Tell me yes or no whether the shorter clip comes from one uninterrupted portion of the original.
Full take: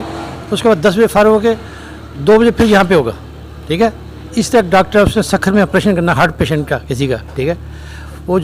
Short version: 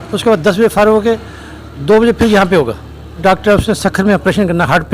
no